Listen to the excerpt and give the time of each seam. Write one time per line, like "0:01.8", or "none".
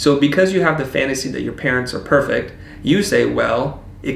none